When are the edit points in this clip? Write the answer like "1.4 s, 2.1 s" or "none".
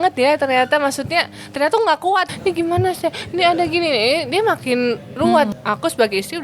2.3 s, 5.5 s